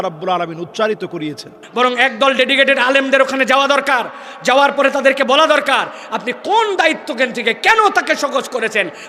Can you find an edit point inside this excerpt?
yes; 1 cut; at 1.6 s

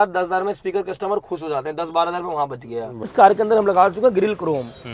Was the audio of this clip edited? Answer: yes; 1 cut; at 3.1 s

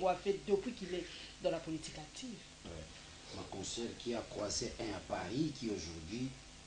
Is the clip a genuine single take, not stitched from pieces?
no; 1 cut; at 2.7 s

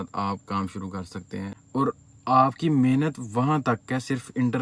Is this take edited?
yes; 1 cut; at 1.6 s

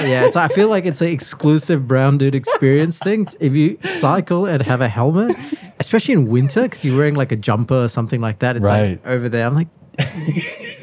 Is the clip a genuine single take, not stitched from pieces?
no; 1 cut; at 3.3 s

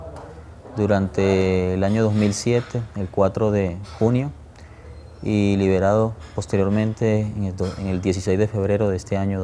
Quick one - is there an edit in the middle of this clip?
yes; 1 cut; at 8.5 s

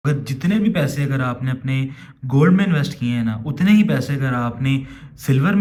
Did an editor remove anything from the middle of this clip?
no; 0 cuts

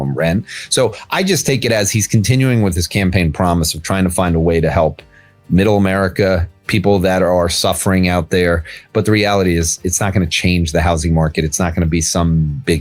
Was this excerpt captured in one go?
yes; 0 cuts

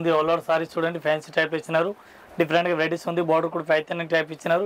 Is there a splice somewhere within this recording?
no; 0 cuts

